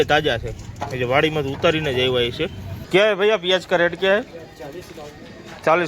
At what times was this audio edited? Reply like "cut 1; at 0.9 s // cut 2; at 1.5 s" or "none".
cut 1; at 2.7 s